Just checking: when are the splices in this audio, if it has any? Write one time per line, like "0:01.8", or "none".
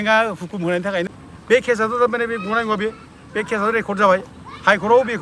0:01.1